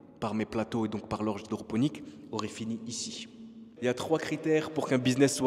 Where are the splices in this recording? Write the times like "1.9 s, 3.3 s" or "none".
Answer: 3.6 s